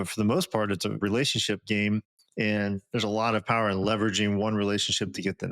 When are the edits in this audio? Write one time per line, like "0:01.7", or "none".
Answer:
0:01.0

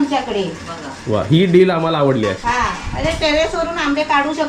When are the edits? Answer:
none

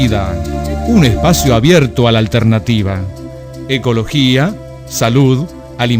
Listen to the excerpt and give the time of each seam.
none

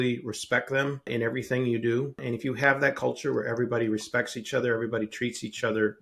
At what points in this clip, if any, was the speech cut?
0:01.1
0:02.2

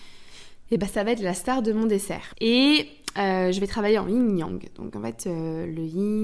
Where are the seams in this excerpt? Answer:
0:02.2

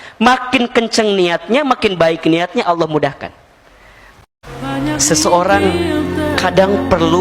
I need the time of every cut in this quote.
0:04.3

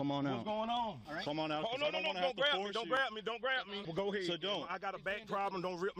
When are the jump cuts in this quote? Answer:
0:01.1
0:03.8

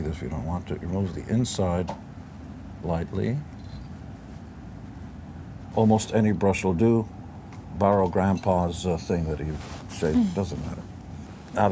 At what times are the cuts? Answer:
none

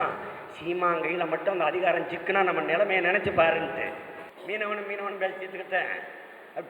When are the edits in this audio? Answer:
0:04.3

